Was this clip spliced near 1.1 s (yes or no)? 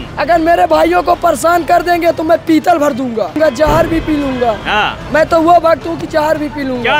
no